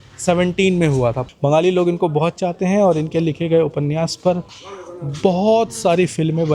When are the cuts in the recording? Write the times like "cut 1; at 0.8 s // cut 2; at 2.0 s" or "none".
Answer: cut 1; at 1.2 s